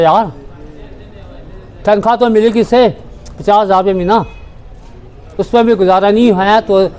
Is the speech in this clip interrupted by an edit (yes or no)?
no